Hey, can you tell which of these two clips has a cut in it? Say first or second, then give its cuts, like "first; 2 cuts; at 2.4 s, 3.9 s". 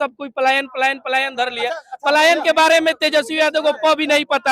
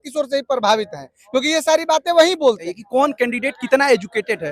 second; 1 cut; at 2.7 s